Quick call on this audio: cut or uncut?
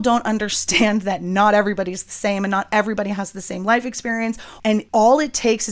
cut